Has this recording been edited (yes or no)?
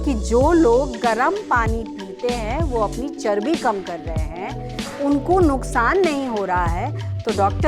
no